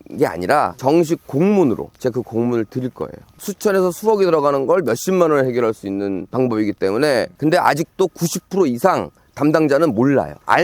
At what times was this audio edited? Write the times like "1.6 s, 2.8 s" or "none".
3.3 s